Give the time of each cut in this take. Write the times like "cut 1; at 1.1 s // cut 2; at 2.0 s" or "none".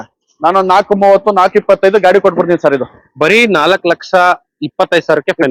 none